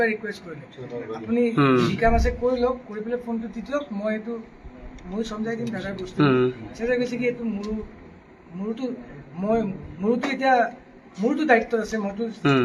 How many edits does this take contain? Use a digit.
0